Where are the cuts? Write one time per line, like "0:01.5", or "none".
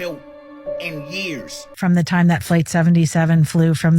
0:01.7